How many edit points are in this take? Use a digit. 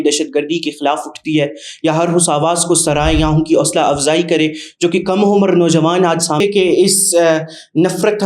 1